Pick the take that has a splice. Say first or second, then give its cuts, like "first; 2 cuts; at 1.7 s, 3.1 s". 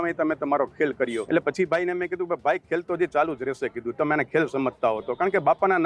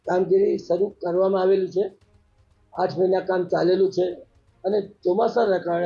first; 1 cut; at 1.2 s